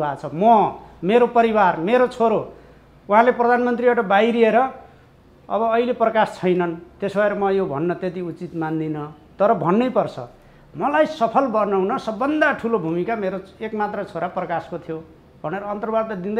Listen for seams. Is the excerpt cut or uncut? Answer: uncut